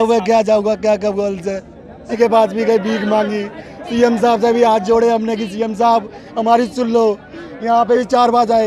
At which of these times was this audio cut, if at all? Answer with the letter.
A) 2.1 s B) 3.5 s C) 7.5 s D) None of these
A